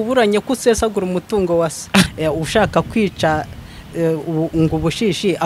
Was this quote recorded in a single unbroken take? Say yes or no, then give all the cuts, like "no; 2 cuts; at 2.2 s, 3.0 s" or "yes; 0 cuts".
no; 1 cut; at 2.1 s